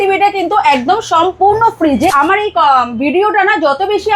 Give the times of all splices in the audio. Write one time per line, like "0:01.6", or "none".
0:02.1